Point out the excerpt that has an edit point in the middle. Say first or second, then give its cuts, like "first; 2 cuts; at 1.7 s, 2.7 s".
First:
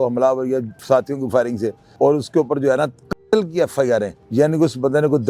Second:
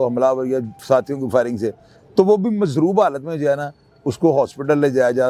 first; 2 cuts; at 1.8 s, 4.2 s